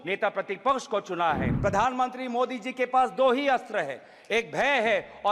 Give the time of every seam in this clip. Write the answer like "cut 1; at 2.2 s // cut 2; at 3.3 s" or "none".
cut 1; at 1.5 s